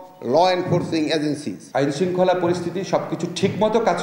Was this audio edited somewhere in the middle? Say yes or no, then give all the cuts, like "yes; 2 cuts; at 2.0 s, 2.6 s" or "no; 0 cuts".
yes; 1 cut; at 1.5 s